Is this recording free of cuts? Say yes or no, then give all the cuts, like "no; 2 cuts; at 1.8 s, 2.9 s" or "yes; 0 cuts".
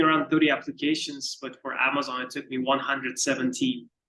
yes; 0 cuts